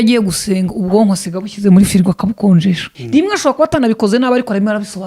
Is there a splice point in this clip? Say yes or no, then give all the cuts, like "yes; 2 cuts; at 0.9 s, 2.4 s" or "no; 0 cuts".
yes; 1 cut; at 2.9 s